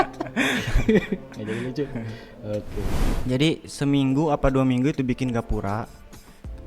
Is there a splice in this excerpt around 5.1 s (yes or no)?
no